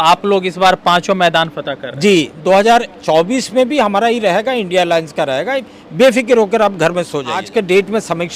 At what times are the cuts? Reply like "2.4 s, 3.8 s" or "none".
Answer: 7.4 s